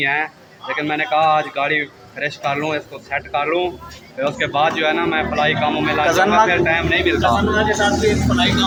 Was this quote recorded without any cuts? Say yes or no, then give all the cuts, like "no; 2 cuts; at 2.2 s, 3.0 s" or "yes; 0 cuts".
yes; 0 cuts